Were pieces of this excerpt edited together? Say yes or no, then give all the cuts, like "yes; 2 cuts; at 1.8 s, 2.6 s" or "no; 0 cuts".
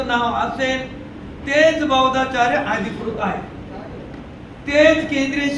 no; 0 cuts